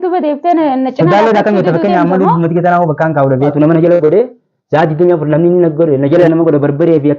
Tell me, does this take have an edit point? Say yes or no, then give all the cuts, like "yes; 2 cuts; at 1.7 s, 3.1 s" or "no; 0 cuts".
yes; 2 cuts; at 3.5 s, 6.3 s